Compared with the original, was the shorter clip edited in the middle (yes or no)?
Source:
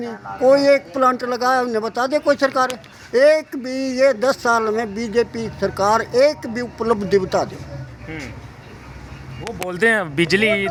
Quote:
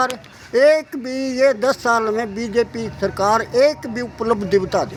no